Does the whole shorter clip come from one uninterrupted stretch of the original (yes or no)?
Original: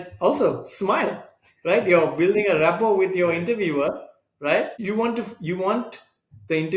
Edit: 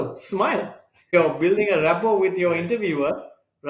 no